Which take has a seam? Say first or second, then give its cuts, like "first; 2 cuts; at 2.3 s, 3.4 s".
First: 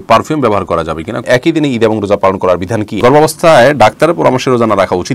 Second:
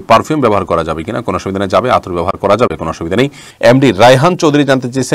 first; 2 cuts; at 1.2 s, 3.0 s